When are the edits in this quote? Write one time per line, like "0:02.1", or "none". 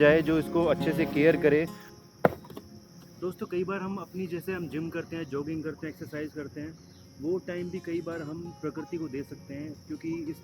0:01.8

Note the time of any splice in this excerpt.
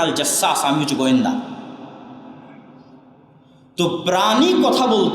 none

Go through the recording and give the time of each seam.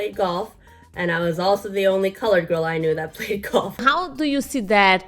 0:03.9

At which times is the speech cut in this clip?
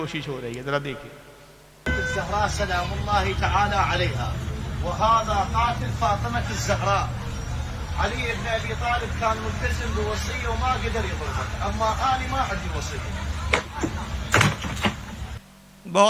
none

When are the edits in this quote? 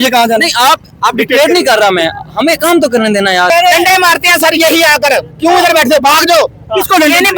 0:03.5
0:06.2

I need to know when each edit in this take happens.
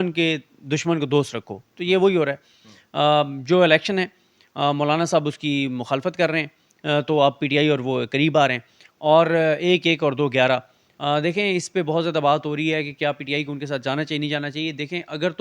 none

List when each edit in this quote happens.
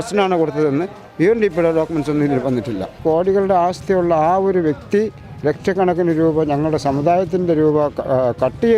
0:03.0

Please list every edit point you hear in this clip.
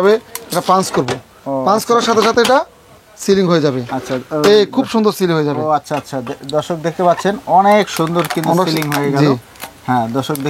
none

